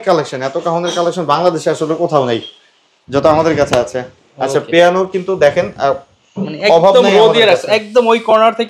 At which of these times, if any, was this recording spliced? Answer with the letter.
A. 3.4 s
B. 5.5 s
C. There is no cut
C